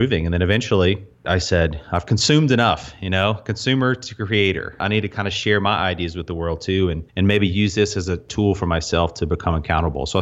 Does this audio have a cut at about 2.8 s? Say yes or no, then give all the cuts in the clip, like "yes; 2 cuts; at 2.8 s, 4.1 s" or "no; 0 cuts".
no; 4 cuts; at 1.2 s, 4.8 s, 7.0 s, 8.3 s